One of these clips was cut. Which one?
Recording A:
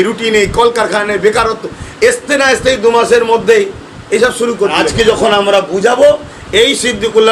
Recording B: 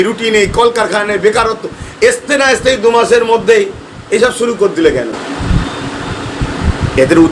A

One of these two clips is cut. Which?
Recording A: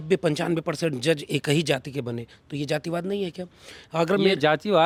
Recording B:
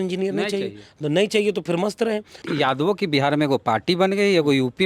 B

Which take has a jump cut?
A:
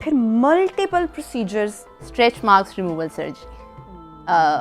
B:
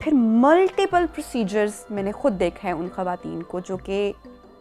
A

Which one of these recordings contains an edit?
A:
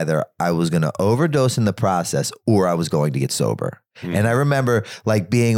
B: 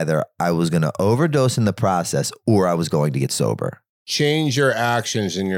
B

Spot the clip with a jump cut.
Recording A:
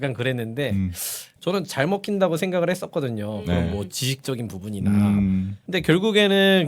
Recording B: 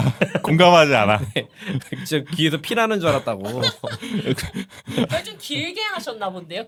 A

